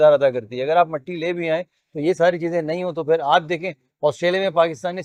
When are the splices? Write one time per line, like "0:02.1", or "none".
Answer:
none